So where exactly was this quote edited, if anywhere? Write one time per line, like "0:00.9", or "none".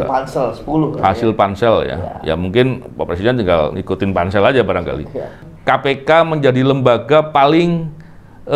0:05.4